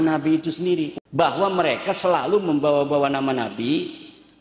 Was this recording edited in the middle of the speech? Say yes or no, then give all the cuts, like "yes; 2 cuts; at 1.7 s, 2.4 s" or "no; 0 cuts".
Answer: yes; 1 cut; at 0.9 s